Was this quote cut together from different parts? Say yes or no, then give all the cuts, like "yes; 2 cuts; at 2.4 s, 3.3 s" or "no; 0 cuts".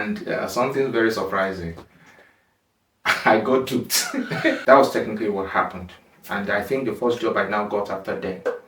yes; 1 cut; at 4.6 s